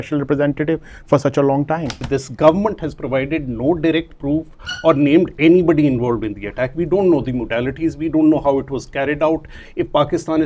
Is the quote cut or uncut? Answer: cut